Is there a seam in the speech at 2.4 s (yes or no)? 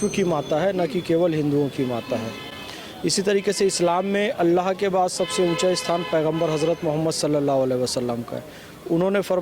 no